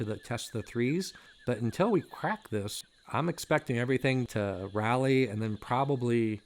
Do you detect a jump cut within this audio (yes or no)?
yes